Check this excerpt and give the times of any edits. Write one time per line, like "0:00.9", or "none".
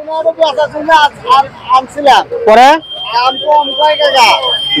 none